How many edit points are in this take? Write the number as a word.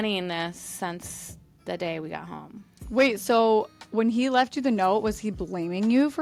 zero